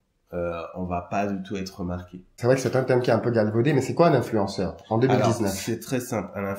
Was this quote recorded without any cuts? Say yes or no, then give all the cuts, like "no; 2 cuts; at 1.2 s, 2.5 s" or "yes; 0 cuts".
no; 1 cut; at 2.3 s